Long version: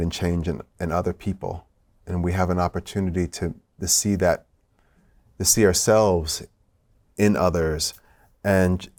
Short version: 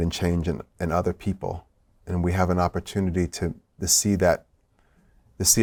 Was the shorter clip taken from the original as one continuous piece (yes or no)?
yes